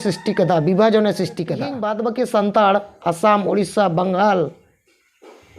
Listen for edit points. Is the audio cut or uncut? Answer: cut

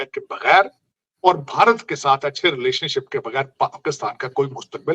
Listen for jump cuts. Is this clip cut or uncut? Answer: uncut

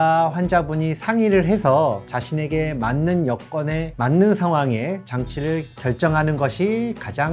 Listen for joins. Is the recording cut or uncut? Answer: uncut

